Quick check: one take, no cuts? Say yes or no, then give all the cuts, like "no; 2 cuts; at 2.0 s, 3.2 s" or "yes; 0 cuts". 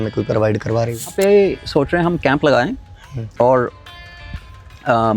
no; 1 cut; at 1.1 s